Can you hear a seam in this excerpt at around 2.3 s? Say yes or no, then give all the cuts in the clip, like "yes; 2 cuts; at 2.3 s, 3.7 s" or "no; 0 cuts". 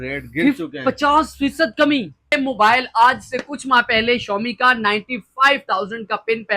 yes; 1 cut; at 2.3 s